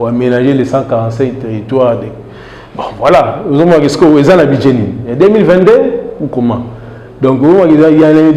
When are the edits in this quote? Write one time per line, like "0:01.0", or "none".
none